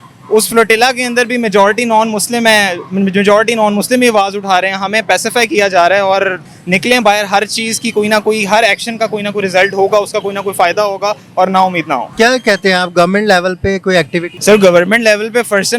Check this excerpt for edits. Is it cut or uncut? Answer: cut